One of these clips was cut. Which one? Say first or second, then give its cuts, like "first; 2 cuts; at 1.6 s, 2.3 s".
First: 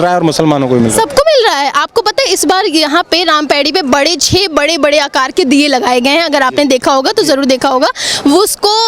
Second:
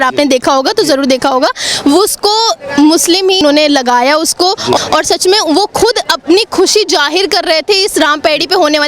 second; 2 cuts; at 3.4 s, 4.8 s